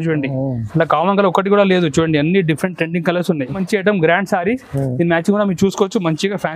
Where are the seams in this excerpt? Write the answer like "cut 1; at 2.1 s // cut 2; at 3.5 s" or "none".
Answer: cut 1; at 3.6 s